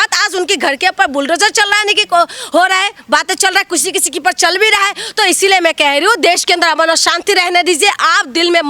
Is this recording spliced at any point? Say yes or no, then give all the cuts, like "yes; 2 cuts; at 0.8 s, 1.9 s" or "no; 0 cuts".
no; 0 cuts